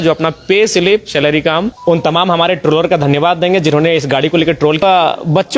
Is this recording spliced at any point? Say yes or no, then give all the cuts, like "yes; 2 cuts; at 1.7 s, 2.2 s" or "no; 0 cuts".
yes; 2 cuts; at 1.7 s, 4.8 s